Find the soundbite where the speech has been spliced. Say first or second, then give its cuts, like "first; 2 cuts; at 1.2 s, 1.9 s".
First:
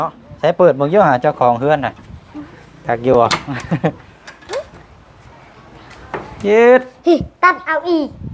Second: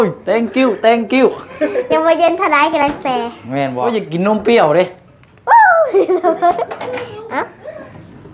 second; 1 cut; at 3.8 s